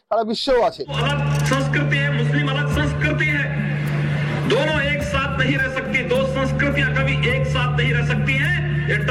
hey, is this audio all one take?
no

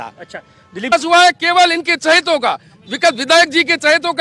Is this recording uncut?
no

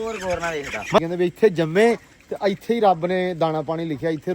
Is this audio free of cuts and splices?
no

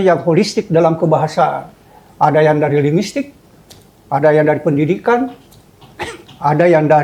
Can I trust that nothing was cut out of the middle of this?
yes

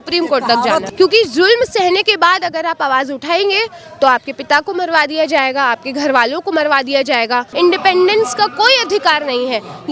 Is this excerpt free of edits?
no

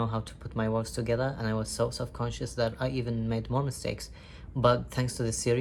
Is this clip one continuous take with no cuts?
yes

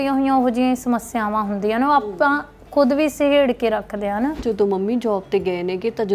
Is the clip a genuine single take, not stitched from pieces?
no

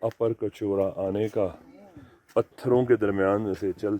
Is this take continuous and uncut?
yes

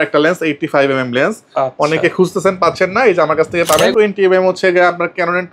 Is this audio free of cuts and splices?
no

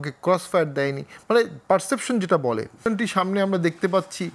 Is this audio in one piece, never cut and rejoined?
no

